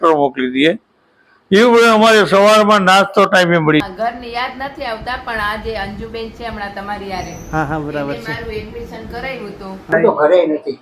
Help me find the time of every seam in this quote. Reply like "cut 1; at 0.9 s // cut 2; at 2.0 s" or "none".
cut 1; at 3.8 s // cut 2; at 9.9 s

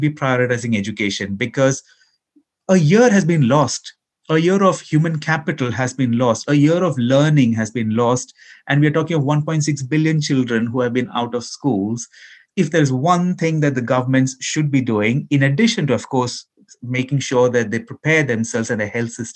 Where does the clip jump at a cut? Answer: none

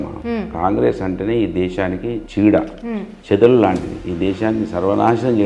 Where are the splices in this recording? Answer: none

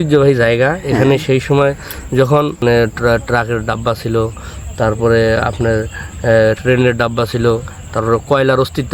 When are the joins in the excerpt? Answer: cut 1; at 2.6 s

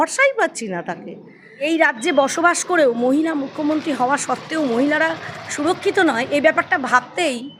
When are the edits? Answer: cut 1; at 1.7 s

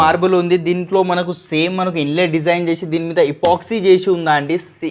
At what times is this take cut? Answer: none

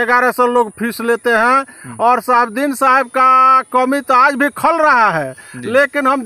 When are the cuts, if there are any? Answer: none

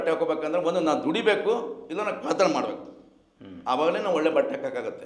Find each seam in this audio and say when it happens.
none

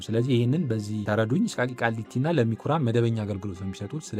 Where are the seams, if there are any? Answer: cut 1; at 1.5 s

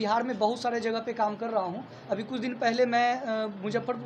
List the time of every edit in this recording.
none

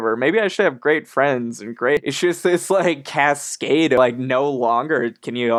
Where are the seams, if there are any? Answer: cut 1; at 2.0 s // cut 2; at 4.0 s

